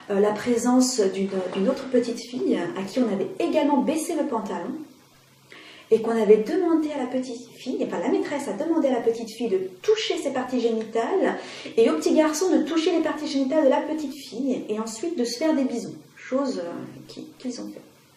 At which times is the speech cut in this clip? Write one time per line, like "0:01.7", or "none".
none